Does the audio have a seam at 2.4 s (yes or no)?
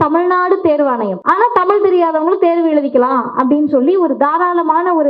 no